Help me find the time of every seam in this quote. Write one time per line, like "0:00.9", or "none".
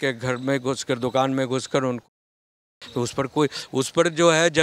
none